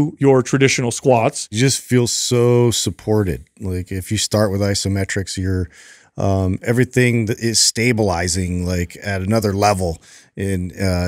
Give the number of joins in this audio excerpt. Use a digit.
1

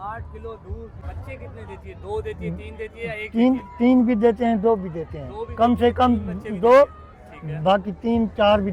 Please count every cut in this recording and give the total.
1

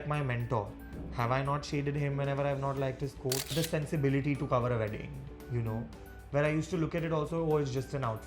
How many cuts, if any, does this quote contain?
1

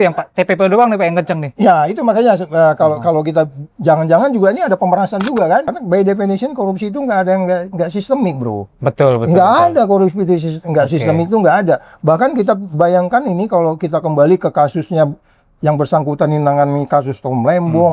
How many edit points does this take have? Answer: 1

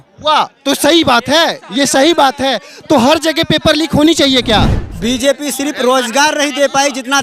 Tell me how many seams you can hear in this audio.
1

